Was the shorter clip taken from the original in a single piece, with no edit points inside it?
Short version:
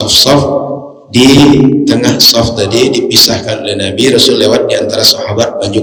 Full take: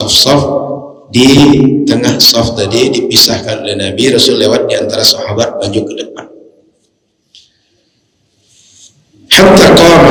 yes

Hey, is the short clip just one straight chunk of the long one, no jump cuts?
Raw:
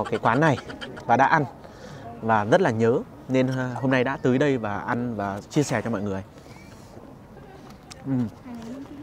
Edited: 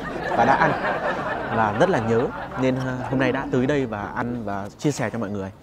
yes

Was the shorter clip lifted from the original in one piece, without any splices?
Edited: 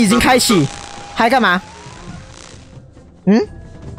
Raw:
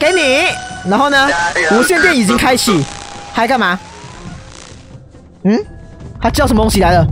yes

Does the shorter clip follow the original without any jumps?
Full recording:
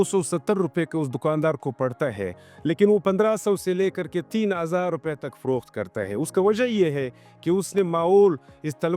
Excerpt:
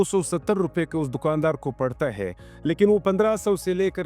yes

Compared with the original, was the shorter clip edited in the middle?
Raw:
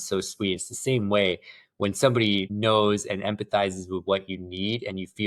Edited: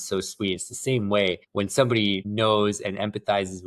yes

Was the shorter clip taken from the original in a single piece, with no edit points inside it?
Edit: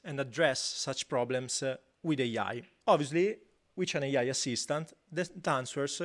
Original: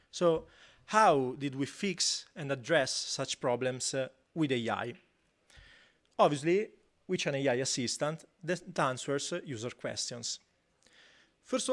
no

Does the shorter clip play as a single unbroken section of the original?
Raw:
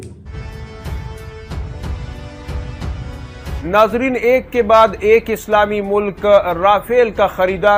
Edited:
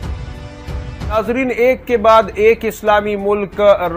no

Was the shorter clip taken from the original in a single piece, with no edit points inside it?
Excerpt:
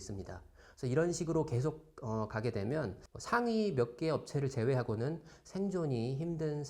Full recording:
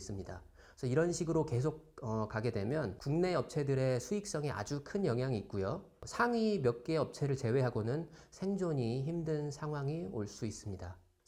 no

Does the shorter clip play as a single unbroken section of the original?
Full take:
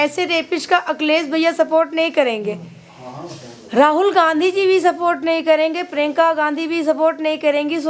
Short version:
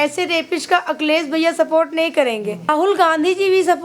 no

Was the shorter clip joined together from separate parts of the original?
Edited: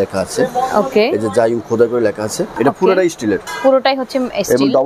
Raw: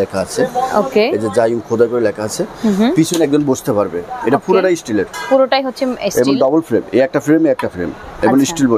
yes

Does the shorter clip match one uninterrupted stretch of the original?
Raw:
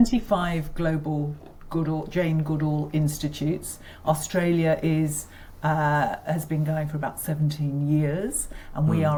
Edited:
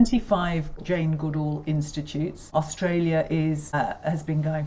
no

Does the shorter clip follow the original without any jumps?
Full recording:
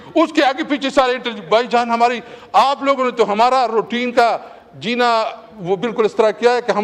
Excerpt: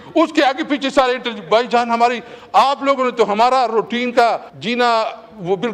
no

